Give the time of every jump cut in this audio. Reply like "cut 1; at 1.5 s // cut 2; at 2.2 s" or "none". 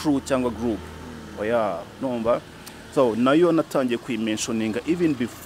none